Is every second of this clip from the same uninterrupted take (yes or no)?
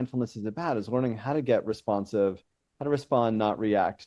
yes